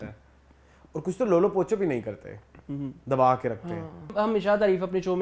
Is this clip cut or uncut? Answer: cut